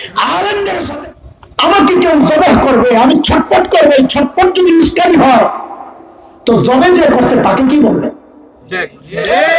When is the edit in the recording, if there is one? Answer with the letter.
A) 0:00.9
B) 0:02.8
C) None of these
A